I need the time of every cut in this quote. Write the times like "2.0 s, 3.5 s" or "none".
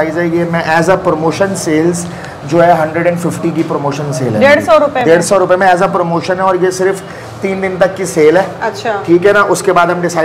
none